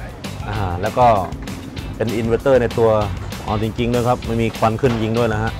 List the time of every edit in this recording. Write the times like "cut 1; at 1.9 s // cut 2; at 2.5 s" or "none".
cut 1; at 3.2 s